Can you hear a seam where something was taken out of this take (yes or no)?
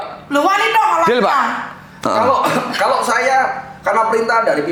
no